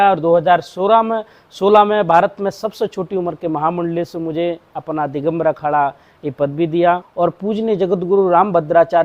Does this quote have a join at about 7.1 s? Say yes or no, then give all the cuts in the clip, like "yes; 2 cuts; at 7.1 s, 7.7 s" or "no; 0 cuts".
yes; 1 cut; at 7.1 s